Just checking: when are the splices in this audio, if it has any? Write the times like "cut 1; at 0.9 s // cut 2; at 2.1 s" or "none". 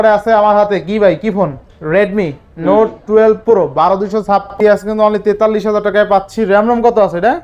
cut 1; at 4.5 s

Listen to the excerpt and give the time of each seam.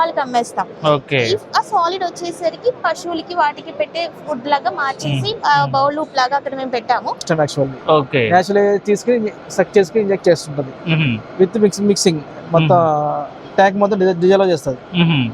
cut 1; at 7.2 s

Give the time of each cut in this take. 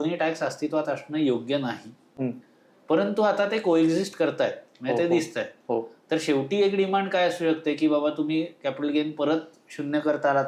none

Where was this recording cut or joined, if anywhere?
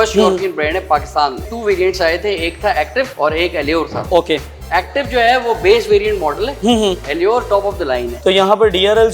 cut 1; at 1.4 s // cut 2; at 3.1 s // cut 3; at 4.0 s // cut 4; at 8.1 s

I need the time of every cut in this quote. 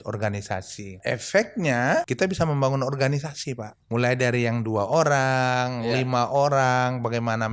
cut 1; at 1.0 s // cut 2; at 2.1 s // cut 3; at 3.7 s

